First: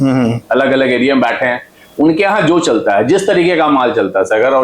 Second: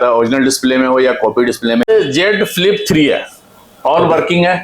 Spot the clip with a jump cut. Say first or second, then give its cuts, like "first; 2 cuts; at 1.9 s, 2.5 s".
second; 1 cut; at 1.9 s